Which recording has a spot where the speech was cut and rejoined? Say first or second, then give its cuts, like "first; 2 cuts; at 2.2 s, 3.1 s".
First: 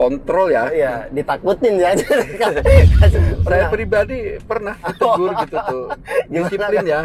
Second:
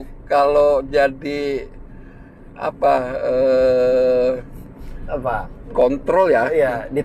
first; 1 cut; at 3.1 s